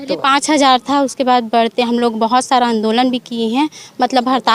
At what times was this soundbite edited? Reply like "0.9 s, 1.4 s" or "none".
none